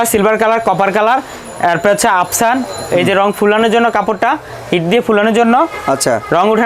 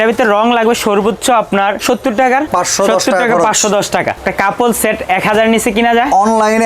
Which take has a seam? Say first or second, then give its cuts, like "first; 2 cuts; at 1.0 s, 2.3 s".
second; 3 cuts; at 1.8 s, 2.5 s, 4.2 s